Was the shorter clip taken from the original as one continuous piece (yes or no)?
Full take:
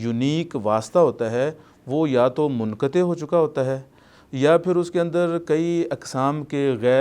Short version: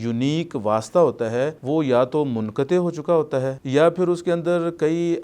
no